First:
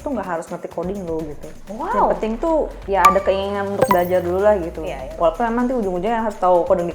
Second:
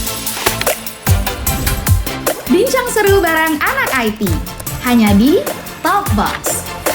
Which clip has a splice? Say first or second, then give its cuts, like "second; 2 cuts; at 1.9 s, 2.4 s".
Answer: first; 3 cuts; at 1.5 s, 2.8 s, 5.1 s